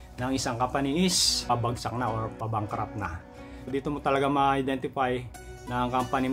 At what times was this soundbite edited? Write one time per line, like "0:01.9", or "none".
0:01.5
0:03.7